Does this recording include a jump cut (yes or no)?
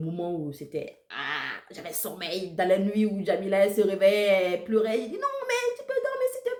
no